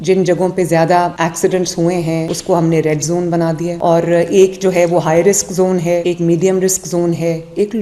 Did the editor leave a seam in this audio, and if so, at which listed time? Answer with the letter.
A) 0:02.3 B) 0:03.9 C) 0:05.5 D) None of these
A